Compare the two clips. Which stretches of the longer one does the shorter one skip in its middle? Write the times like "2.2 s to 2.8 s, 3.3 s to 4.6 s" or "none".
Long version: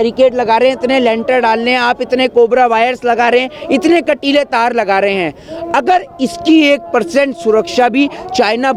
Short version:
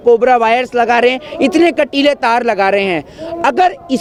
none